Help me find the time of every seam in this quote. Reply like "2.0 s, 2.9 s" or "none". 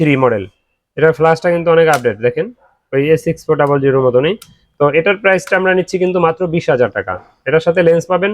none